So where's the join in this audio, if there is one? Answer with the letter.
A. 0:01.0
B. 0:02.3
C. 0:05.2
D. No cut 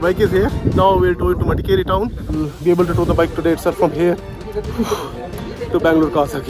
B